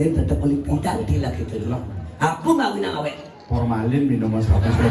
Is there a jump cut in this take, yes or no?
no